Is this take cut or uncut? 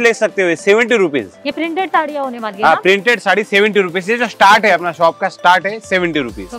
uncut